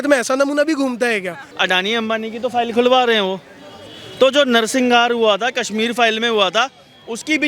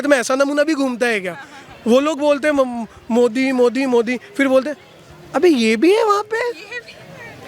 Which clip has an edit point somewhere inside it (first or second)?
first